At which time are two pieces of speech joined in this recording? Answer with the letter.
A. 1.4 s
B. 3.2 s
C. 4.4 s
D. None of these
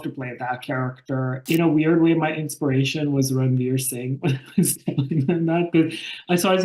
A